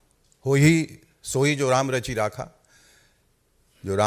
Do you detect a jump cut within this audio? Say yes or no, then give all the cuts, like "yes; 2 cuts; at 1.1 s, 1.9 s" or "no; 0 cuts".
no; 0 cuts